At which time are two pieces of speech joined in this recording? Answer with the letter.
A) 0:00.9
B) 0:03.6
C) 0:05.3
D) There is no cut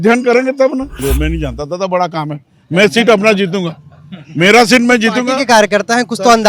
A